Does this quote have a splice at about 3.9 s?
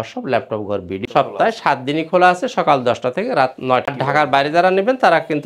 yes; 2 cuts; at 1.0 s, 3.9 s

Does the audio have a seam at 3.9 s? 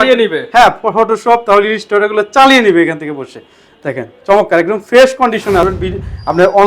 no; 1 cut; at 5.6 s

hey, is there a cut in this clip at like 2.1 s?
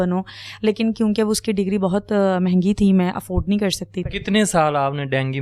no; 1 cut; at 4.0 s

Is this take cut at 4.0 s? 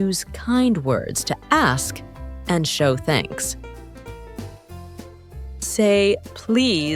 no; 0 cuts

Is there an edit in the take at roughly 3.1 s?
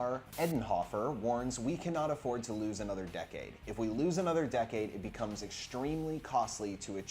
yes; 1 cut; at 3.1 s

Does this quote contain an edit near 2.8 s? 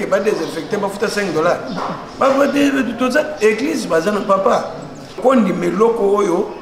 no; 1 cut; at 5.2 s

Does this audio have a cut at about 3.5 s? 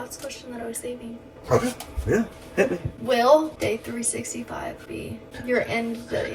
yes; 3 cuts; at 2.9 s, 3.5 s, 5.1 s

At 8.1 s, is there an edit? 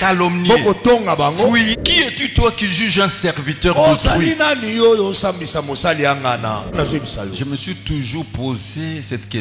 no; 2 cuts; at 1.7 s, 6.8 s

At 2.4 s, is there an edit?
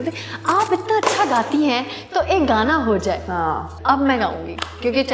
no; 1 cut; at 3.7 s

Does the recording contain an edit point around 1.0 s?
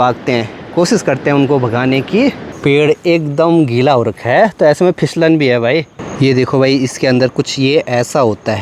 no; 2 cuts; at 2.5 s, 6.0 s

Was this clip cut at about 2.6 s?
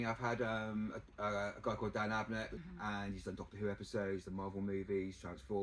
yes; 1 cut; at 2.6 s

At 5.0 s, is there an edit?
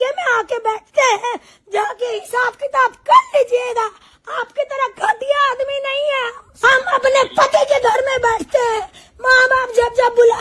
no; 1 cut; at 6.4 s

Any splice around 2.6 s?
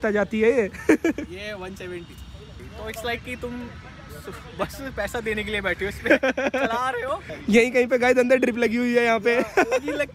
yes; 2 cuts; at 2.6 s, 7.3 s

